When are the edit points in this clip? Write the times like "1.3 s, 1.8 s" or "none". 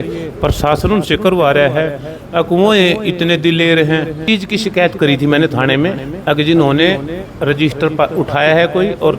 4.2 s